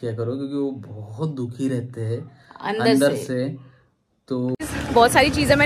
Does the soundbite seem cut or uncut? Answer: cut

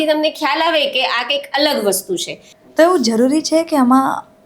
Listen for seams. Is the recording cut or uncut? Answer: cut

